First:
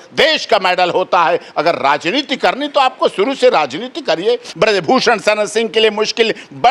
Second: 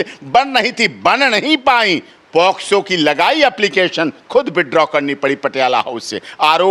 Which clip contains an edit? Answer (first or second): first